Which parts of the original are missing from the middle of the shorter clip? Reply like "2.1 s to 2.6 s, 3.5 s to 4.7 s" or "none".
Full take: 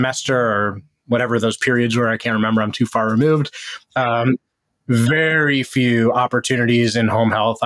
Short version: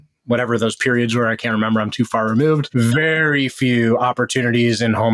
3.5 s to 4.8 s